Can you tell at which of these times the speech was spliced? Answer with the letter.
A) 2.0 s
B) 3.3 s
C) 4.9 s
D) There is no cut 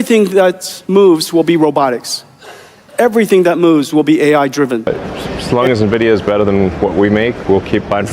C